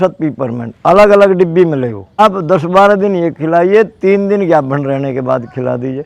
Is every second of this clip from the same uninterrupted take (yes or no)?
no